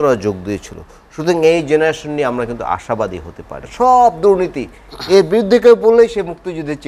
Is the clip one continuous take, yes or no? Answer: no